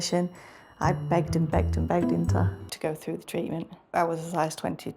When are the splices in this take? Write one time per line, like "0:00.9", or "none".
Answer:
0:02.6